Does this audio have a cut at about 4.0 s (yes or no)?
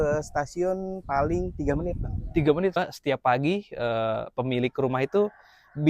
no